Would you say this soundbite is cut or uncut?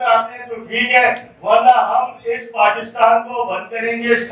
uncut